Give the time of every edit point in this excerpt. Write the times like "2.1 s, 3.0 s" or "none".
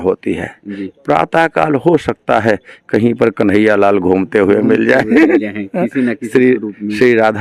none